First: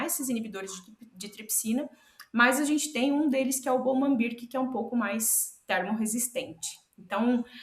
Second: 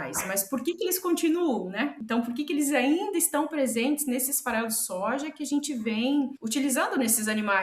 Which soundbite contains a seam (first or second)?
second